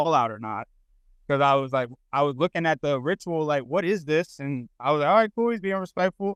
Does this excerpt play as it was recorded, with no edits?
yes; 0 cuts

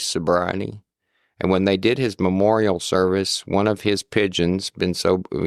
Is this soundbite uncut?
yes; 0 cuts

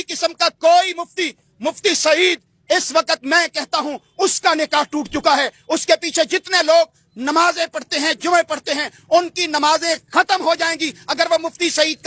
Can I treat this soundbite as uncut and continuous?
yes; 0 cuts

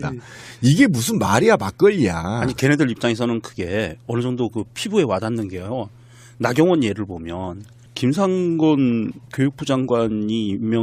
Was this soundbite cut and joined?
yes; 1 cut; at 6.4 s

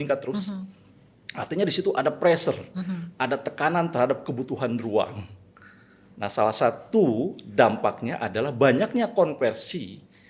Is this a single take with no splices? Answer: yes; 0 cuts

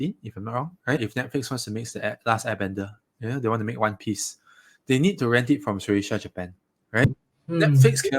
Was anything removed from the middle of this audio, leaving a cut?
yes; 2 cuts; at 1.1 s, 7.0 s

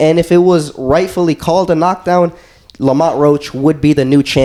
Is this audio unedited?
yes; 0 cuts

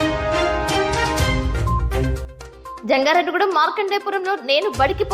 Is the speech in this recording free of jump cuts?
no; 1 cut; at 2.8 s

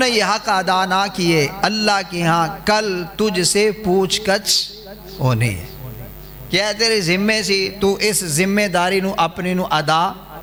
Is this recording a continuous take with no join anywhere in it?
yes; 0 cuts

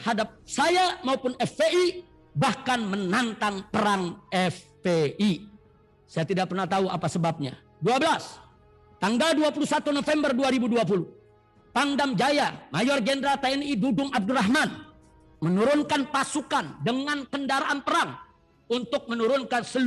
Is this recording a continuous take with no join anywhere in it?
yes; 0 cuts

